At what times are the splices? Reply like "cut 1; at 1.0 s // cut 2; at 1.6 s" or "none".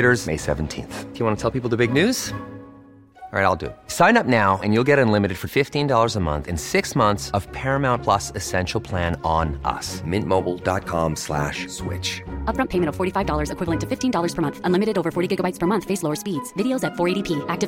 none